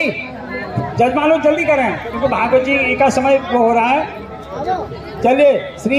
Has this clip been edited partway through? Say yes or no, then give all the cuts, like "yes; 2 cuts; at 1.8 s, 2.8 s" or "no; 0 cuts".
no; 0 cuts